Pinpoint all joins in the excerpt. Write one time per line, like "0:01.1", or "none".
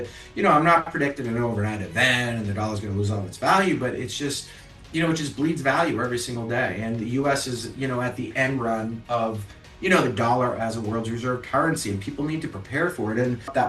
none